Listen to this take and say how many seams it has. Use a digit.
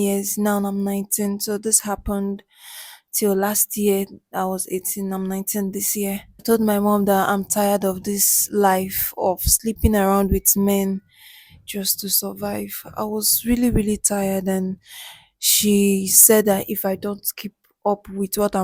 1